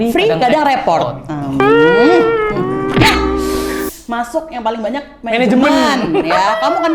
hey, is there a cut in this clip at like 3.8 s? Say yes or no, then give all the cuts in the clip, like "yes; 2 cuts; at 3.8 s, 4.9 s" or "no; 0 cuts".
yes; 1 cut; at 3.8 s